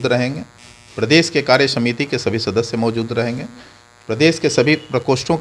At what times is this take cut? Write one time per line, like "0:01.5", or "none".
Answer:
none